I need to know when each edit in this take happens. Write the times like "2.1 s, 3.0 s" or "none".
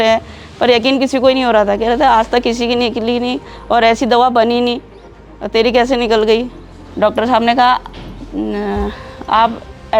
none